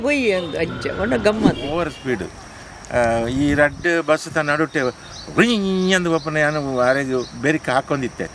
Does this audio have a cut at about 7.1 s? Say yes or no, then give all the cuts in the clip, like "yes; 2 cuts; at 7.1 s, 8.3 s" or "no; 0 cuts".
no; 1 cut; at 1.7 s